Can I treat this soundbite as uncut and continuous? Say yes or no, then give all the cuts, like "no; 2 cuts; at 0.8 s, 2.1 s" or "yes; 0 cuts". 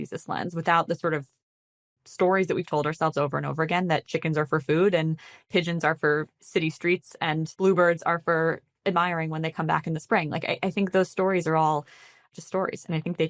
no; 3 cuts; at 5.4 s, 7.5 s, 12.2 s